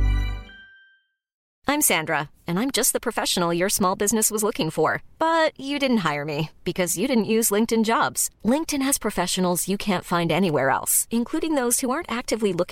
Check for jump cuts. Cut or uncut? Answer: cut